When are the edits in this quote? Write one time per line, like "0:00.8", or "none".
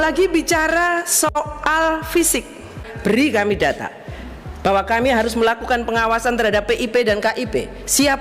0:02.8